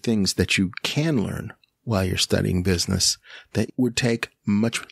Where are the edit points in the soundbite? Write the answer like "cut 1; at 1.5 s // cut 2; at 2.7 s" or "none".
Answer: cut 1; at 3.7 s